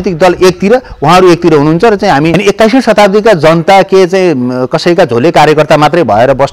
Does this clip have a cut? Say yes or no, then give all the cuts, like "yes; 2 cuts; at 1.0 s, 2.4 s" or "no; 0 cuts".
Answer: yes; 1 cut; at 2.4 s